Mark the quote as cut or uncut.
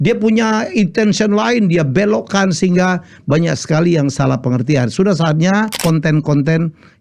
cut